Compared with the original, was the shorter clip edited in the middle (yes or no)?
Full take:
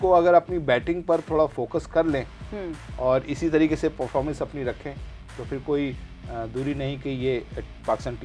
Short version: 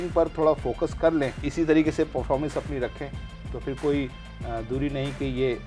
yes